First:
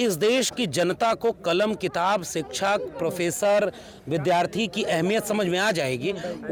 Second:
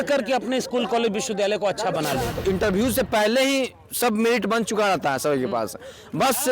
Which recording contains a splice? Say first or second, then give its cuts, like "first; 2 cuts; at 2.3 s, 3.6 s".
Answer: second; 1 cut; at 2.3 s